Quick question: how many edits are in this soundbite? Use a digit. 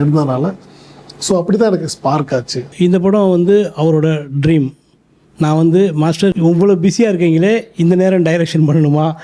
2